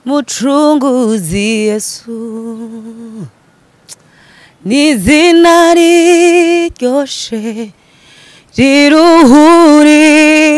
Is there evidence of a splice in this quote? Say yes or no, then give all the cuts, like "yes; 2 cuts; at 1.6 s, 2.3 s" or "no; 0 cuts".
no; 0 cuts